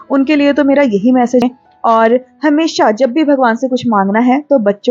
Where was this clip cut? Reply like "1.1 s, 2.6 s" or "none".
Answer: 1.4 s